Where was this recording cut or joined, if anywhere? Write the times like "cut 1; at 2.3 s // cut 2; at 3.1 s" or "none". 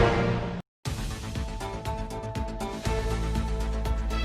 cut 1; at 3.2 s